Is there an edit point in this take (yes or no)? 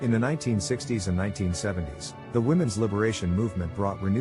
no